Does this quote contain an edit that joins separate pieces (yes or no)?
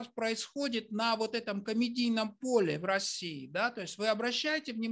no